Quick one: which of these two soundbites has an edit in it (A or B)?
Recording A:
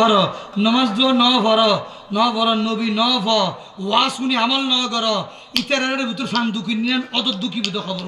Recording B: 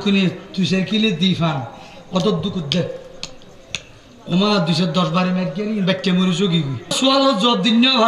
B